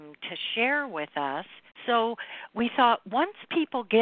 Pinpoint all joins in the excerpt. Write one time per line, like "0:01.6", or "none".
0:01.6

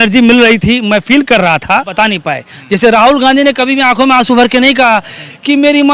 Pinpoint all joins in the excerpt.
0:01.9

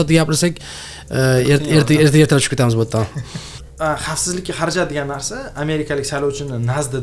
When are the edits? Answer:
0:03.6

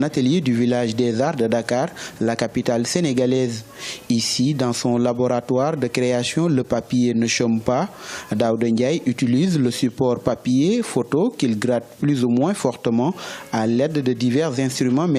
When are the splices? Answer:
0:03.6

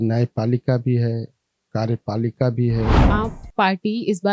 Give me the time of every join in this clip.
0:03.1

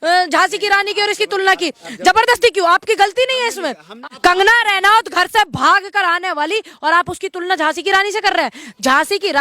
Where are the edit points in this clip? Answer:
0:04.0

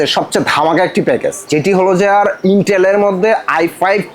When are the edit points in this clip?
0:01.4

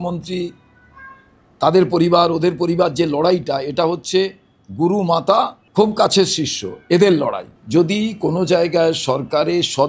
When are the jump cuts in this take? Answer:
0:05.6
0:07.5

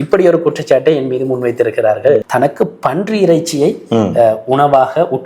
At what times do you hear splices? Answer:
0:02.3

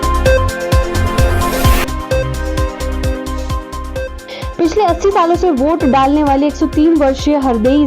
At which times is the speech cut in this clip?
0:01.7

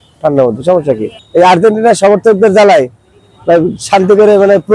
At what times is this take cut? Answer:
0:01.1

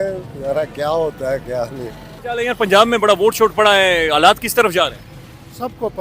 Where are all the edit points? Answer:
none

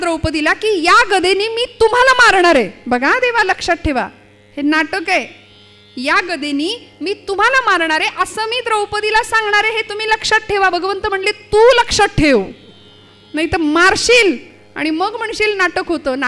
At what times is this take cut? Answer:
none

